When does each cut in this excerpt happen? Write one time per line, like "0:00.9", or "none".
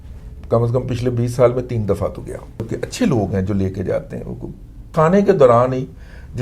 0:02.7
0:04.9